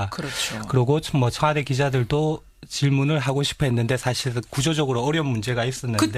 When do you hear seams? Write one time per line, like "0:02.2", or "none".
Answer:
none